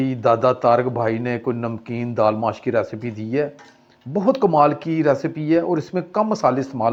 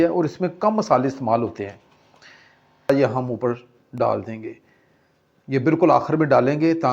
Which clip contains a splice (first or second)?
second